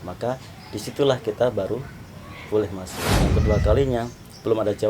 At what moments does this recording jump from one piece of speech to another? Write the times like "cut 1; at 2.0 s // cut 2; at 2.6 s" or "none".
cut 1; at 3.0 s